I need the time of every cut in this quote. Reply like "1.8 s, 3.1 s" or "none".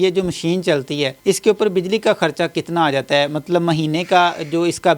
1.1 s